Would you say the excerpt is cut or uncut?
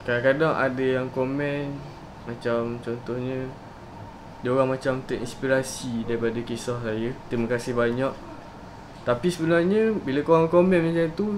uncut